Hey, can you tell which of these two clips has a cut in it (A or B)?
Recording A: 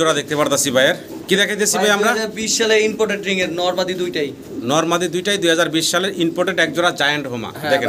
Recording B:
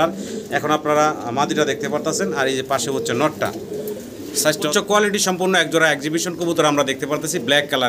B